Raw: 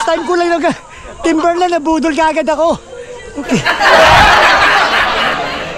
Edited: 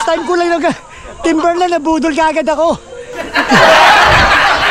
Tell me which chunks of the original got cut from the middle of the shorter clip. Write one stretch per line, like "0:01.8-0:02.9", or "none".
0:03.3-0:03.6